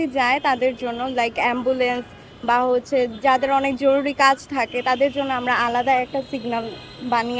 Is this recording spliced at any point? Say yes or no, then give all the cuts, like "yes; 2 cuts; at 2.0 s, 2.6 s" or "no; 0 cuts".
no; 0 cuts